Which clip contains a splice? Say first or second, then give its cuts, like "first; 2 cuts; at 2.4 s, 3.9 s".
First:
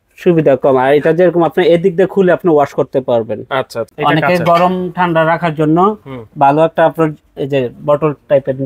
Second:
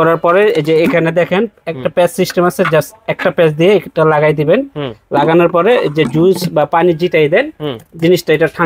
first; 1 cut; at 3.9 s